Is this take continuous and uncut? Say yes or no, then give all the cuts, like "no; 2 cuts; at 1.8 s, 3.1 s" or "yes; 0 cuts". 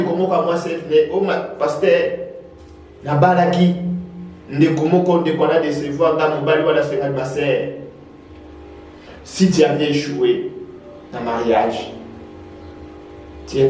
yes; 0 cuts